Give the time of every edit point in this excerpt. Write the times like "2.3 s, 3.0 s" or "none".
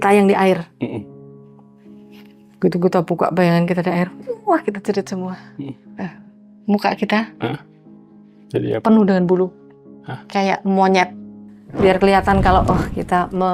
11.4 s